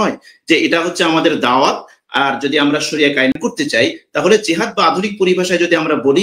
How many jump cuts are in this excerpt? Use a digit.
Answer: 1